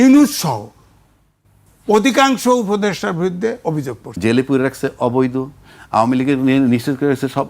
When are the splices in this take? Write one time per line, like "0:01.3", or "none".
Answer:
0:04.0